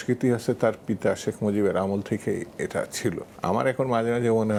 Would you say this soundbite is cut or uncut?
uncut